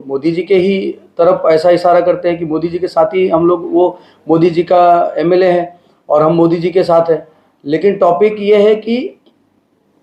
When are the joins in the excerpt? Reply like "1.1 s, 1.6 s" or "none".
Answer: none